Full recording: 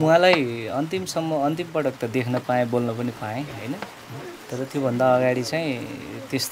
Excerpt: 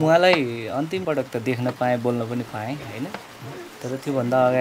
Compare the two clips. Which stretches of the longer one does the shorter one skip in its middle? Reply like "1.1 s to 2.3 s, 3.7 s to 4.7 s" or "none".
1.0 s to 1.7 s